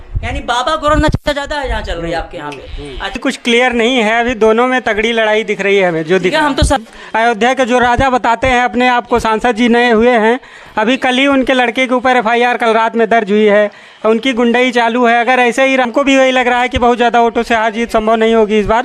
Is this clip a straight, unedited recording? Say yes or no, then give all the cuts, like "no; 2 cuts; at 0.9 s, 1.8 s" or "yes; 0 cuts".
no; 3 cuts; at 3.2 s, 6.9 s, 15.9 s